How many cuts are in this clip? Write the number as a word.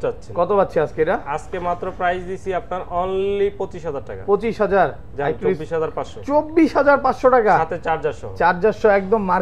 zero